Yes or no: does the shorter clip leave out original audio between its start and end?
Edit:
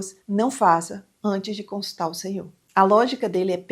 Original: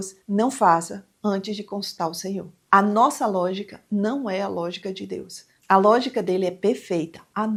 yes